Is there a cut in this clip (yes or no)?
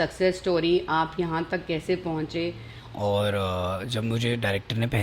yes